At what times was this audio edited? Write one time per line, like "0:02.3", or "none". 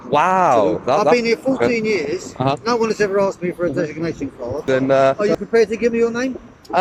0:01.1
0:04.6

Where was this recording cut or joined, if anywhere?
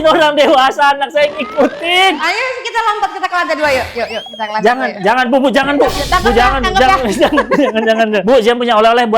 none

